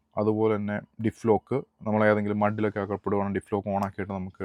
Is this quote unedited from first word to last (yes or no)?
yes